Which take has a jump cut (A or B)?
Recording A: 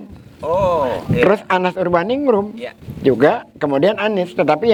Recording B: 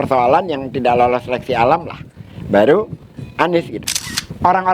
B